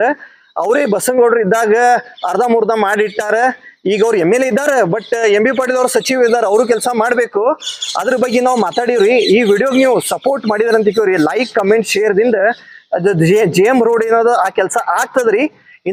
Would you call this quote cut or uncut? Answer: uncut